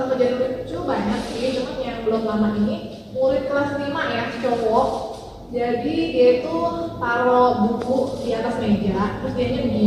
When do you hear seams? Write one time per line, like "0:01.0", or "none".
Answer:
none